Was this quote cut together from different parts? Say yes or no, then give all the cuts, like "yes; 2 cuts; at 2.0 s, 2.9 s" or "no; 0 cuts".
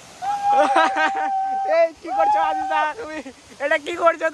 no; 0 cuts